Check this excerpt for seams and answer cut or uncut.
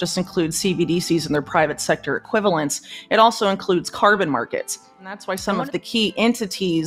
cut